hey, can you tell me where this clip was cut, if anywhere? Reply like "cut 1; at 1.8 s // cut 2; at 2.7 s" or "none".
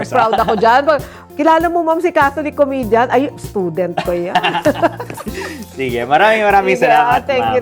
none